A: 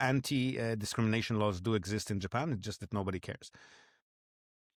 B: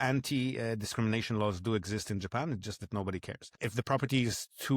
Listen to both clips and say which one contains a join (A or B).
B